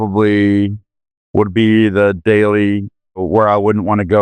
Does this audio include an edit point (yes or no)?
yes